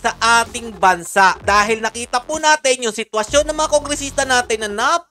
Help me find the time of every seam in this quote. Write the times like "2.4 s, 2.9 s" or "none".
1.4 s